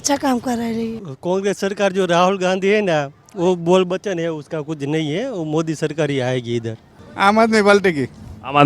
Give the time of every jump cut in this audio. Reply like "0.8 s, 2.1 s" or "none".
1.1 s, 7.0 s